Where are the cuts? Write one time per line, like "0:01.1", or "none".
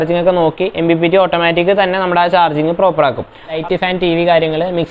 0:03.6